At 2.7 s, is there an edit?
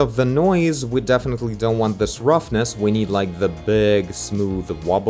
no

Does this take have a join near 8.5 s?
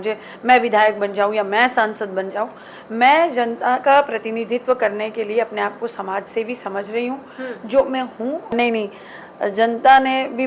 yes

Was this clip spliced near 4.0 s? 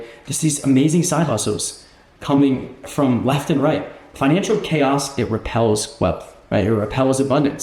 yes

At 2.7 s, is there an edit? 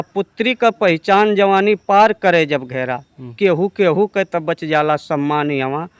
no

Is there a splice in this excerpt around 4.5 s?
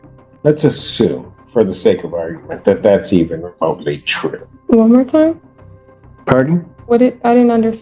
yes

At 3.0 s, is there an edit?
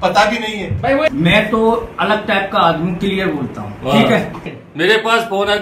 no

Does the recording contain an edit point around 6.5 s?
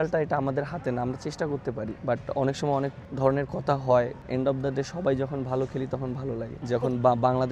yes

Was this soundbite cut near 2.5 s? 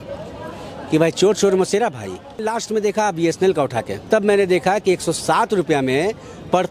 yes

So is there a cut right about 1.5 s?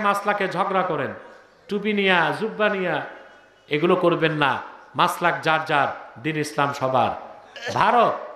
no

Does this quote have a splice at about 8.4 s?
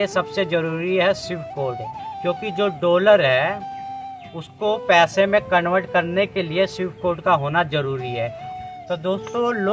yes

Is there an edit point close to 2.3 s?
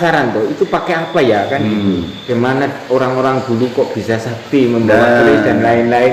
yes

